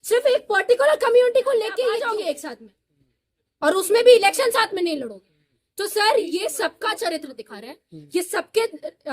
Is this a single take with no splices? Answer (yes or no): no